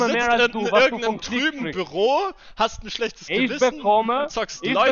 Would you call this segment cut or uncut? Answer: uncut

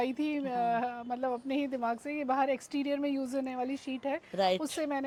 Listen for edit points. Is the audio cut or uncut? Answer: uncut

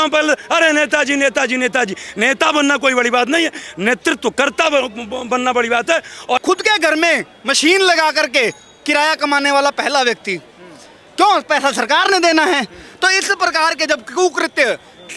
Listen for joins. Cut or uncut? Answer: cut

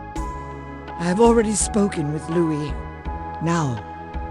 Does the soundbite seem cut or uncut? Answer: cut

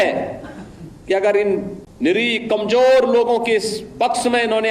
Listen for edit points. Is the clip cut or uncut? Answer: cut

